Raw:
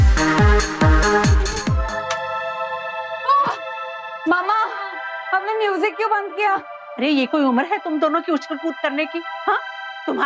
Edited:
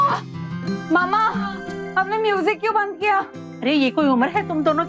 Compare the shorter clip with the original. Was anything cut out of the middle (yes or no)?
no